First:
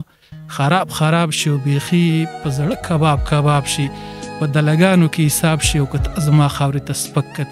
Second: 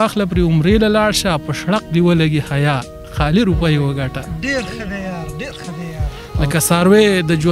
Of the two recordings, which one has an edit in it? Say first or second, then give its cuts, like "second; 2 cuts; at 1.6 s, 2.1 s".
second; 1 cut; at 6.2 s